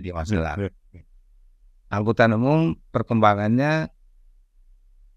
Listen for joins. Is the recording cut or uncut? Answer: uncut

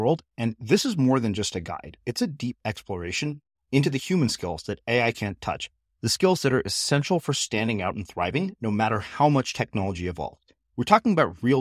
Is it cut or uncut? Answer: uncut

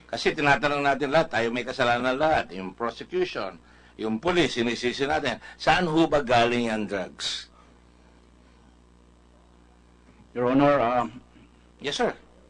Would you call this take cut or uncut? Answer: cut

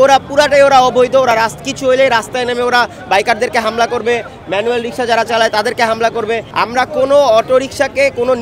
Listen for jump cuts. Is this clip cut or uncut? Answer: cut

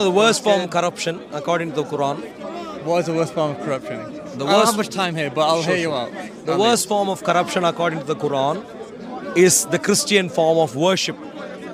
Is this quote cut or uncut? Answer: uncut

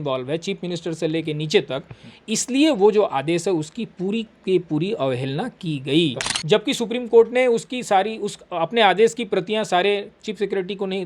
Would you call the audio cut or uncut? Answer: cut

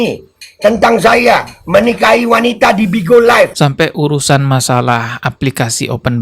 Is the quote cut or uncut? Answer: cut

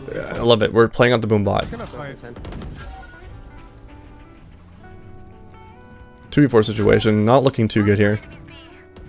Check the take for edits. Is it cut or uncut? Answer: uncut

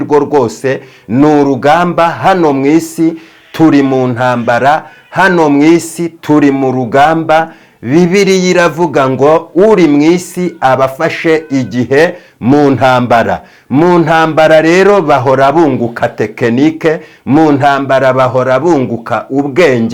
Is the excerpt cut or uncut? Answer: uncut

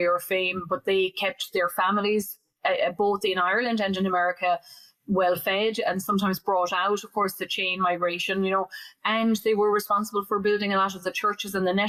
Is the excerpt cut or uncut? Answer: uncut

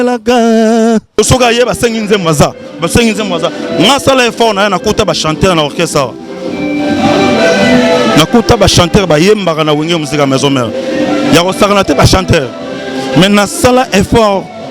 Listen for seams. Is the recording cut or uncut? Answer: cut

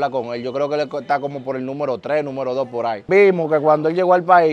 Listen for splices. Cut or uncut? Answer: cut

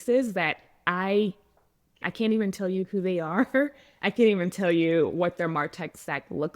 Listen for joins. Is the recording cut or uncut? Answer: cut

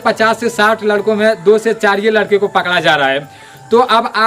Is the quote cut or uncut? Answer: uncut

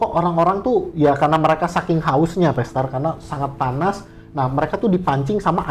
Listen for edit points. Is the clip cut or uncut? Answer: uncut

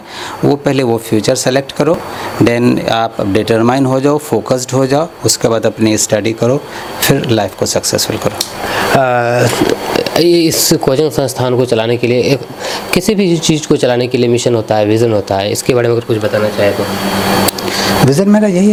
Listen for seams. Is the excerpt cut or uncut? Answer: uncut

